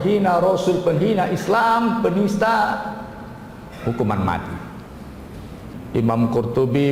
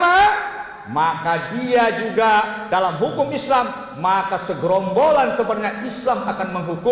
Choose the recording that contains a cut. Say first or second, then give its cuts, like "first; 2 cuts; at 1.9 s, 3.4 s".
first; 1 cut; at 5.8 s